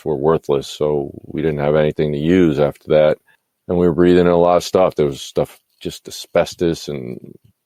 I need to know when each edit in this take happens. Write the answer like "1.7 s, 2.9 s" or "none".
none